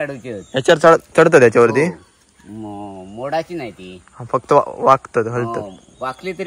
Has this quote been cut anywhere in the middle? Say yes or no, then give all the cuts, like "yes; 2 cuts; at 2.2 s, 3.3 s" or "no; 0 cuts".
no; 0 cuts